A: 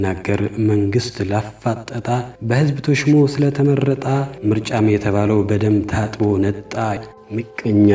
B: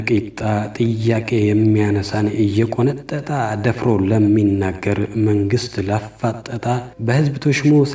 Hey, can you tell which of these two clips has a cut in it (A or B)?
A